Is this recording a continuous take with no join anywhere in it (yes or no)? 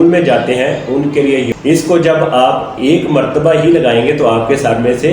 no